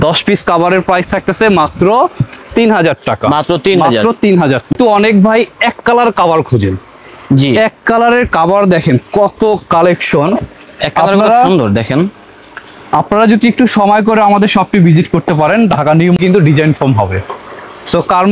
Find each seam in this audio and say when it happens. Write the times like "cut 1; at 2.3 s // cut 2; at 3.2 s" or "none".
cut 1; at 4.7 s // cut 2; at 16.2 s

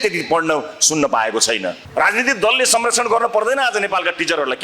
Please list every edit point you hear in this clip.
cut 1; at 1.8 s

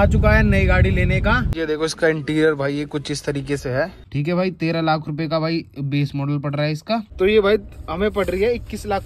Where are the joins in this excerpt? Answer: cut 1; at 1.5 s // cut 2; at 4.0 s // cut 3; at 7.1 s

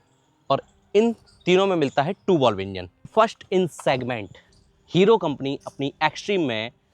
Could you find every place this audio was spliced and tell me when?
cut 1; at 3.1 s

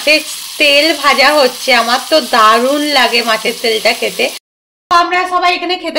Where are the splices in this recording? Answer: cut 1; at 4.5 s

